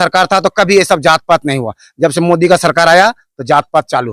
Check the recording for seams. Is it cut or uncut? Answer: uncut